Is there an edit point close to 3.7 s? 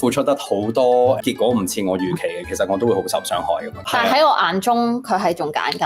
yes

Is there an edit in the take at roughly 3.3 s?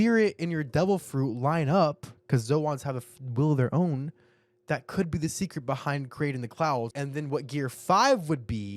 no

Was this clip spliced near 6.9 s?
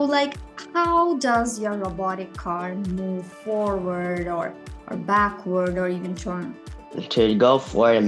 yes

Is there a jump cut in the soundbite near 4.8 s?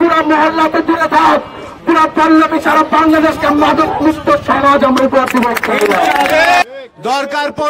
no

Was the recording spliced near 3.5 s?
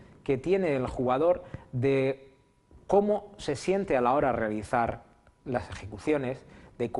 no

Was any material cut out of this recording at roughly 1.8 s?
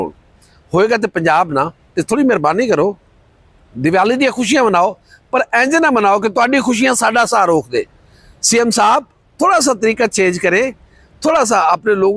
no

